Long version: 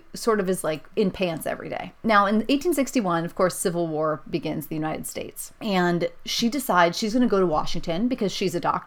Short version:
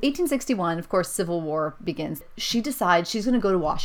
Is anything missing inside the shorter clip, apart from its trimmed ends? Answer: yes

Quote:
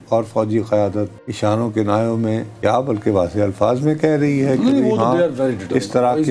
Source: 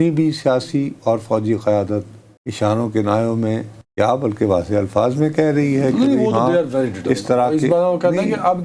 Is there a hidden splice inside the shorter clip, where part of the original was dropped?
yes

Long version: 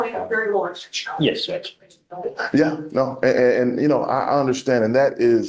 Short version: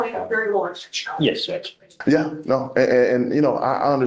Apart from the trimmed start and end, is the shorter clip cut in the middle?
yes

